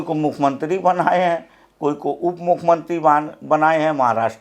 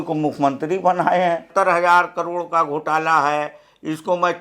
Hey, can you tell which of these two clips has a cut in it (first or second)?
second